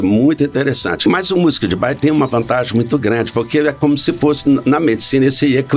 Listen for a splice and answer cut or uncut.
cut